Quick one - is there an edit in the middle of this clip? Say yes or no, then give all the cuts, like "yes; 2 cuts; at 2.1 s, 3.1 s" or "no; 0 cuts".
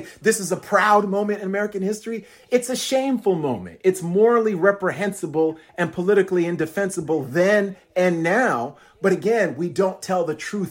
no; 0 cuts